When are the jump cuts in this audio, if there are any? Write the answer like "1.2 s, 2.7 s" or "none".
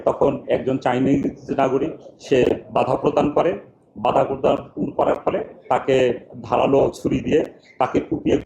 none